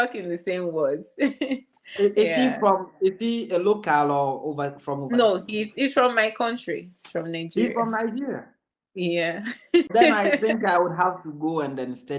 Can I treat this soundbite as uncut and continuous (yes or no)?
no